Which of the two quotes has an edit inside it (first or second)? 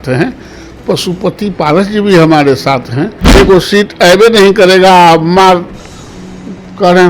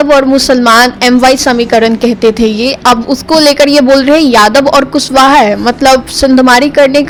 first